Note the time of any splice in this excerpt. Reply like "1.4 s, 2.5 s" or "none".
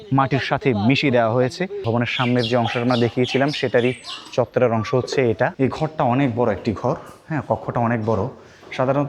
1.8 s, 5.5 s